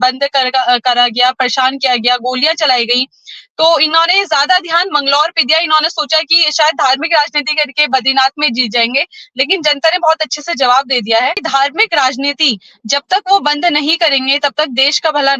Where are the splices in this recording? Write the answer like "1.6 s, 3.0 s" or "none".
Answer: 11.4 s